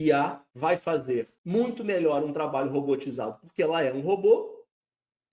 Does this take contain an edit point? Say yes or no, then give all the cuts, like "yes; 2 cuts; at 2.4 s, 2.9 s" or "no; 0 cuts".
yes; 1 cut; at 0.9 s